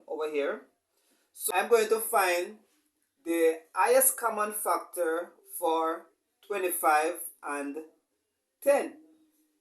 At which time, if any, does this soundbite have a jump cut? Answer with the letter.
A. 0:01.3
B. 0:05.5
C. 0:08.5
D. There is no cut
A